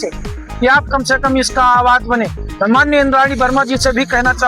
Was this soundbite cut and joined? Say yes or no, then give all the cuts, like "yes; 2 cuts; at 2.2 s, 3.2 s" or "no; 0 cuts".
no; 0 cuts